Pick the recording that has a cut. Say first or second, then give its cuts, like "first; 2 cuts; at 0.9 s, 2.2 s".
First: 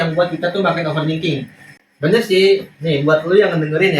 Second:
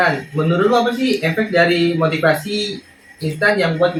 first; 1 cut; at 1.9 s